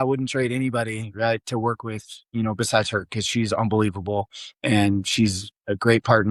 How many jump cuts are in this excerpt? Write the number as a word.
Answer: zero